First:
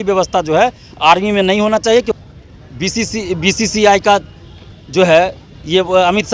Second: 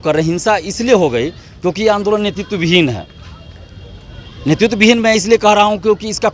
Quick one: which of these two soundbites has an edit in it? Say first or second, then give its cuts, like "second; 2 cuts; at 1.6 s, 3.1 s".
first; 1 cut; at 2.2 s